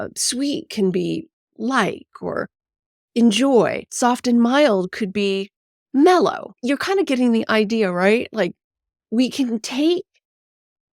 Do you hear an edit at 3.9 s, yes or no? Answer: yes